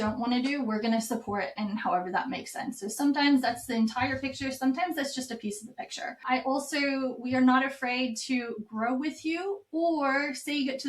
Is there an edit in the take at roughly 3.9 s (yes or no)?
no